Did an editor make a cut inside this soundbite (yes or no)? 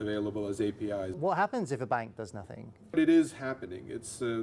yes